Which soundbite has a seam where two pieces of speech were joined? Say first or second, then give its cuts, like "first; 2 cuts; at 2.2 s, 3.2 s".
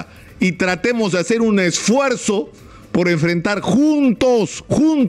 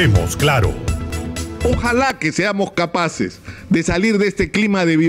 second; 1 cut; at 1.4 s